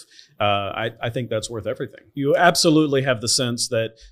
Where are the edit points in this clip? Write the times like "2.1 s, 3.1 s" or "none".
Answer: 2.2 s